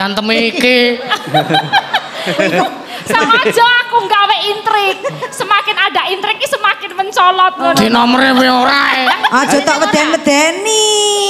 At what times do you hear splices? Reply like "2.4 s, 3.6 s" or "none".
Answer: 9.3 s